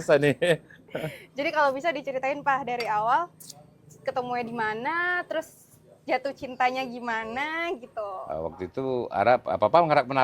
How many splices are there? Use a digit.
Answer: 1